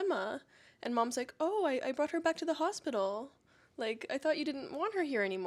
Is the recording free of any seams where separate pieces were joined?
yes; 0 cuts

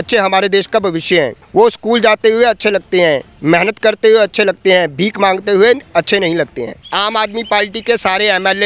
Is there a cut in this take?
yes; 2 cuts; at 1.4 s, 6.7 s

